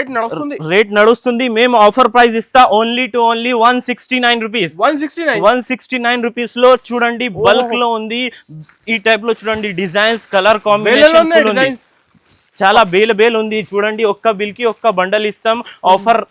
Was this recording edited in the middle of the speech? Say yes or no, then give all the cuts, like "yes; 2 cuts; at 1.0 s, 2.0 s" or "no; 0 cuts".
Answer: no; 0 cuts